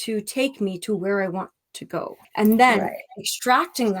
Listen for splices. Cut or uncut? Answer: cut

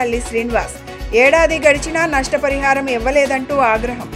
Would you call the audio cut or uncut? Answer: uncut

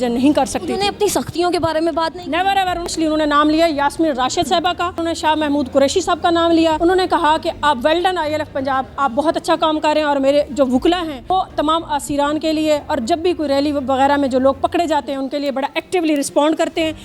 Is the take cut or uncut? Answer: cut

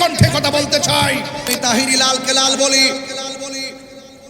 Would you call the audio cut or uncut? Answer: cut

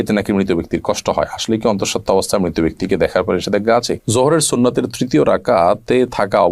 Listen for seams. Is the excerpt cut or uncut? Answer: cut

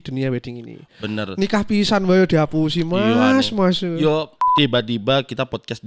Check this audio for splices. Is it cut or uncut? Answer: cut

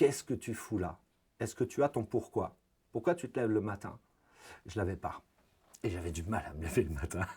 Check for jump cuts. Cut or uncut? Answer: uncut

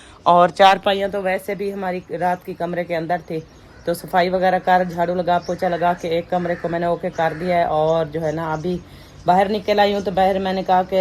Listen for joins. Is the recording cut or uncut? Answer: uncut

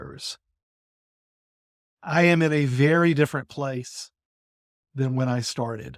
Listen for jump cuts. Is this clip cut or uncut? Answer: uncut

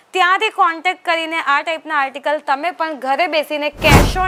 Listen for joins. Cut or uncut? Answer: uncut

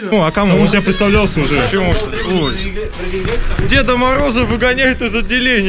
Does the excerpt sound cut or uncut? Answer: uncut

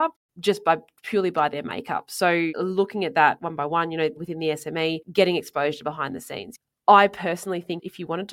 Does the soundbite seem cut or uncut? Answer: cut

